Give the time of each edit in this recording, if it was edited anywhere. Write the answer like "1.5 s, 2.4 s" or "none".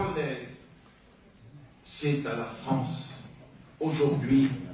2.8 s